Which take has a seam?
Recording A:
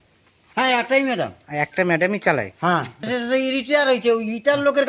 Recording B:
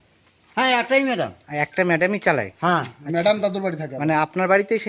A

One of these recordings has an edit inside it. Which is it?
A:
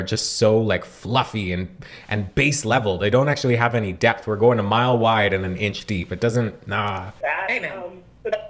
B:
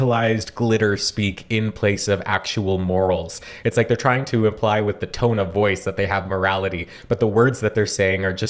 A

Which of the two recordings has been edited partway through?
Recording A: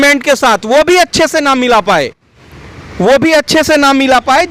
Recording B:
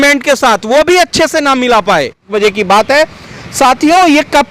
B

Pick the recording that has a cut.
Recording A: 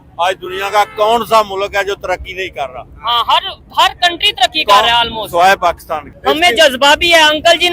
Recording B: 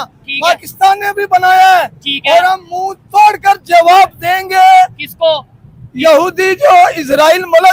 A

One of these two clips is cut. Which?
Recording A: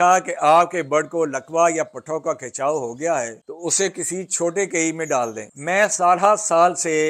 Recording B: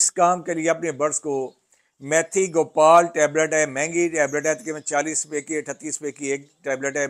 A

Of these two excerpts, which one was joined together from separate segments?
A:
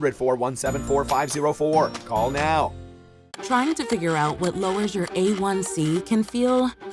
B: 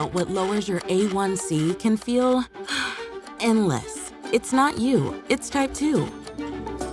A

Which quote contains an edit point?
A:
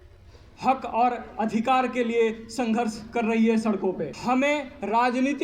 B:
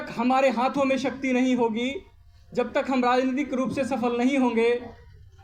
A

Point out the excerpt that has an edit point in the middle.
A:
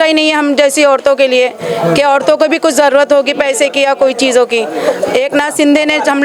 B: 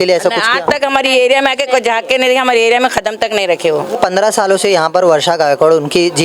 B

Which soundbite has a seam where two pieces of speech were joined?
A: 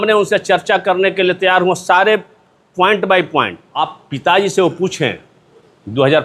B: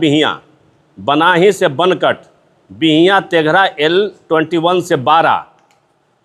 A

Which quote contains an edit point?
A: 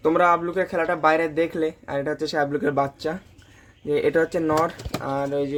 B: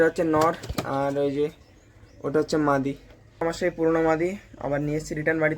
B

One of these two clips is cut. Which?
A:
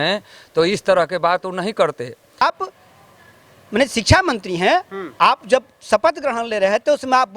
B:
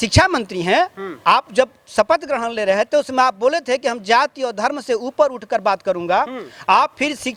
A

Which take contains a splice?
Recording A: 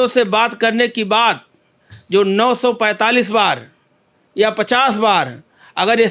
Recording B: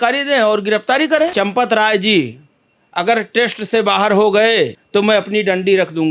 B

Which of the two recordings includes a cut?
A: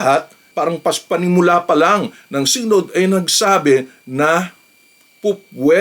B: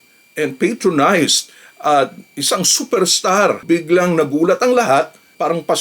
B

